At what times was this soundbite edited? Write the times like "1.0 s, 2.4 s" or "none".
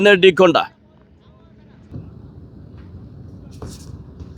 2.0 s

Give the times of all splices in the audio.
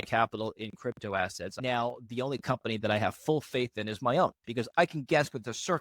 1.6 s

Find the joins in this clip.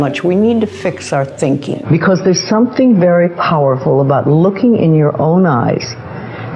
1.8 s

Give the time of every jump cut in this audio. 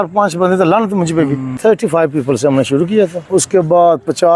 1.6 s, 3.2 s

